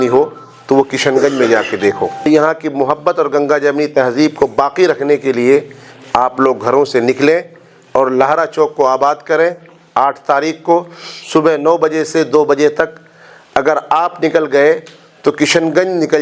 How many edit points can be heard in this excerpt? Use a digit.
1